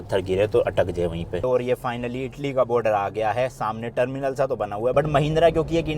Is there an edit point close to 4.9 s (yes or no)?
yes